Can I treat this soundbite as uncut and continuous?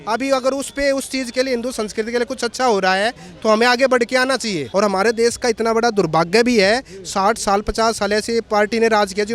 no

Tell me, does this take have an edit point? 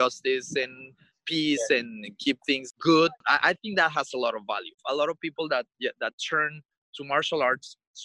yes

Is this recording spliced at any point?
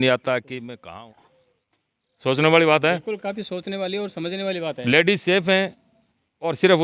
yes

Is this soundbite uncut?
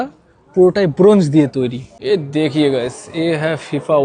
no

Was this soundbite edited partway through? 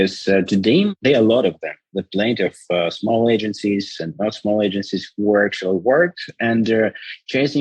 yes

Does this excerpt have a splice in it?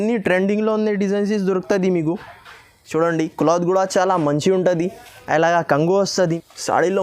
yes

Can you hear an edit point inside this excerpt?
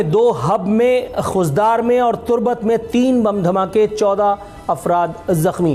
no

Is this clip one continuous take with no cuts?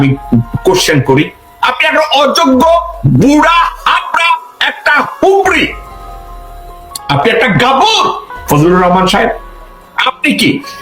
no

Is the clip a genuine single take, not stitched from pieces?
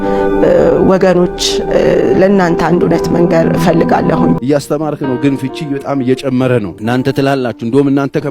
no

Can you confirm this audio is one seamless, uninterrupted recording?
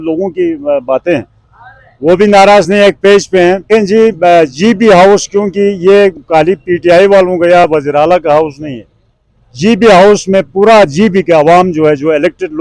no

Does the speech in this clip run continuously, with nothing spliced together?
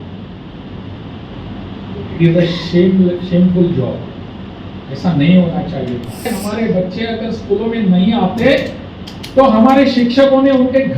no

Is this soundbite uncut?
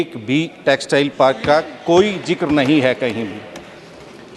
yes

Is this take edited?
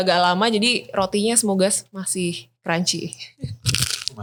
no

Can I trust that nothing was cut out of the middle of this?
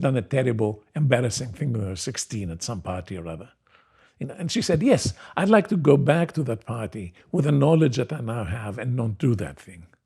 yes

